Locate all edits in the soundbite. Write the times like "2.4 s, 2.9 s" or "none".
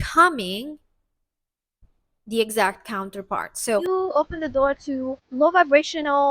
3.8 s, 5.2 s